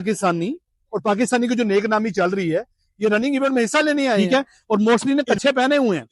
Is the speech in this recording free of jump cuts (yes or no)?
no